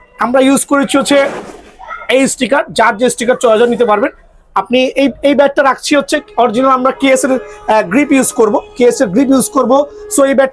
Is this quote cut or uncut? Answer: uncut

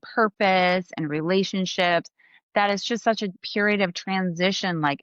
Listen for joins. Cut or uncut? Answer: cut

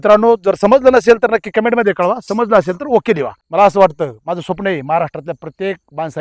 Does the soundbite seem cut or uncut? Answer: cut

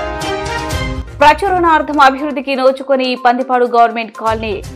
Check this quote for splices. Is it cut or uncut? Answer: cut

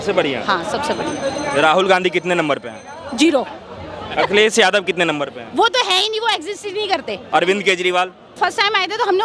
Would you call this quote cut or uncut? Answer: cut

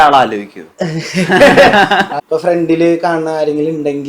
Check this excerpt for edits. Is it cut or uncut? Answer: cut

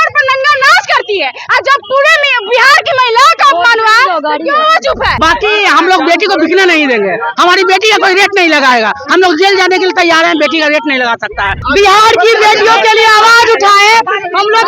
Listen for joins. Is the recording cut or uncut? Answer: cut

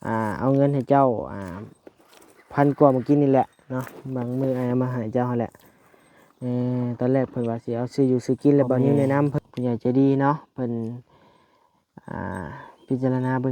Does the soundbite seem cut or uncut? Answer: cut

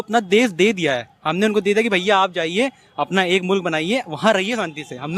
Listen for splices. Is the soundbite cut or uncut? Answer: uncut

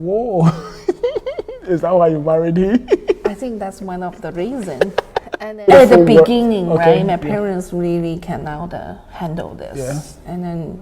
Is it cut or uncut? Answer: cut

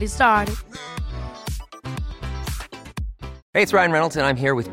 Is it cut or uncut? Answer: cut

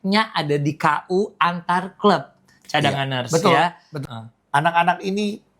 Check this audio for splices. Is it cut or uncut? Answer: cut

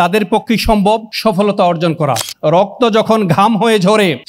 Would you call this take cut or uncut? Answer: cut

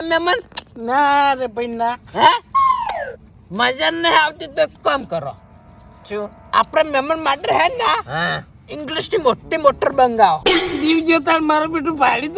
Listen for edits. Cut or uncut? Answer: cut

